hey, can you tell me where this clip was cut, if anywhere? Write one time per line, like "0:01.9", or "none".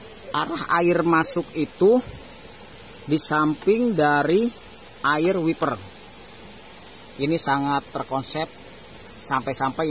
none